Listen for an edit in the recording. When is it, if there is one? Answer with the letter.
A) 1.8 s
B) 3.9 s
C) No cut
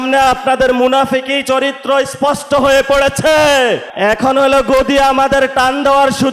B